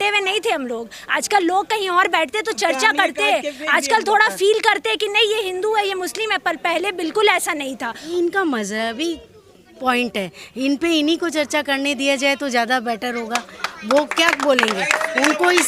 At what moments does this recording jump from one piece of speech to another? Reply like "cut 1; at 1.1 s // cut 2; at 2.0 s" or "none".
cut 1; at 7.9 s